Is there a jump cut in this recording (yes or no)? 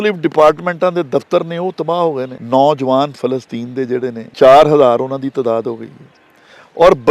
yes